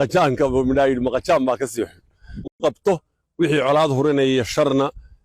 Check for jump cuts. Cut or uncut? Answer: cut